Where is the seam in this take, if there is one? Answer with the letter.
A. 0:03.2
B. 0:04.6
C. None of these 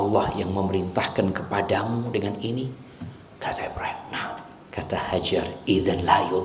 B